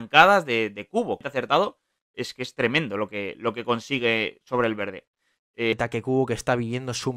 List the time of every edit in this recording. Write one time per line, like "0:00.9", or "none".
0:01.2
0:05.7